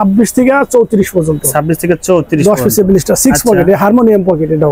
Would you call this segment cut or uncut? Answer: uncut